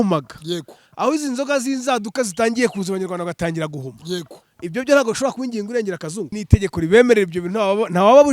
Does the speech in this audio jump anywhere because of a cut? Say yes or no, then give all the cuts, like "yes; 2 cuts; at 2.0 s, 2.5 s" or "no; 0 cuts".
yes; 1 cut; at 6.4 s